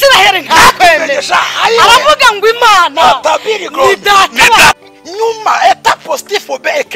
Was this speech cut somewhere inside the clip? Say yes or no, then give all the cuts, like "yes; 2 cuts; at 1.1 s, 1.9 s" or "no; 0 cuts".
yes; 1 cut; at 4.9 s